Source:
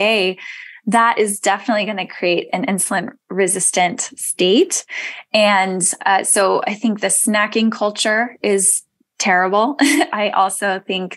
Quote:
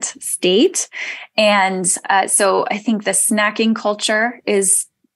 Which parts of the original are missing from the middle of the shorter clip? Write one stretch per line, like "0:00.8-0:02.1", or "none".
none